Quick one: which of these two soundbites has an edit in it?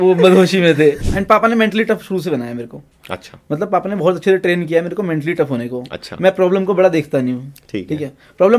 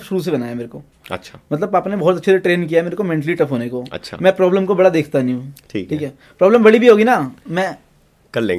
first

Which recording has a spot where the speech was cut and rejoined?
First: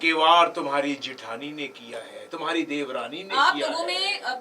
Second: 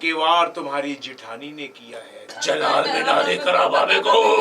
second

